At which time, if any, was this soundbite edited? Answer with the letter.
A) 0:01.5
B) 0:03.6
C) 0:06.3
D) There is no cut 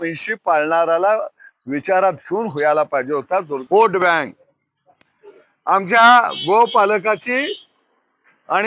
B